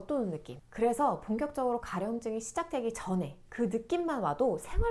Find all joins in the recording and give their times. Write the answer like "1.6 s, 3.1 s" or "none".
none